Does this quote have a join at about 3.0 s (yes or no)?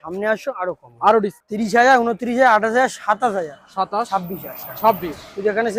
no